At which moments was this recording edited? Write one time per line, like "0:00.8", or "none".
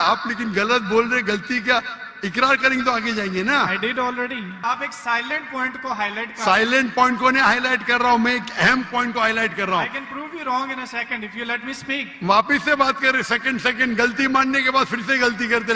0:04.6